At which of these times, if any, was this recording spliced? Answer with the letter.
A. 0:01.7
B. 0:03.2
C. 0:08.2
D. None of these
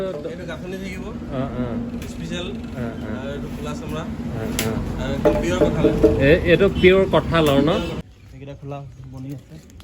C